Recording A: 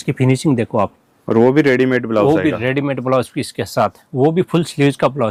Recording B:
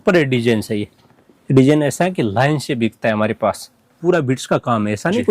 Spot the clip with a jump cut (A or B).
B